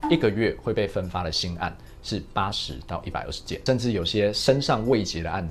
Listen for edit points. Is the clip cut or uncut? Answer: cut